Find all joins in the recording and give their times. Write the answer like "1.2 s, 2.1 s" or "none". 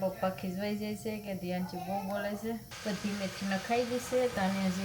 2.7 s